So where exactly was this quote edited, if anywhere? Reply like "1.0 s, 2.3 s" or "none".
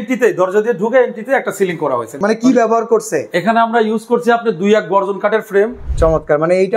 2.2 s, 5.8 s